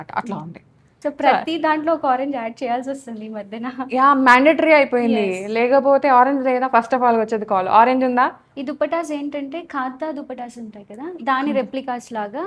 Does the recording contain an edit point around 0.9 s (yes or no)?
yes